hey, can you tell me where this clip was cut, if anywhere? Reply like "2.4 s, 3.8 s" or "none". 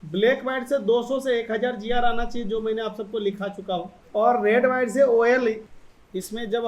4.0 s, 5.6 s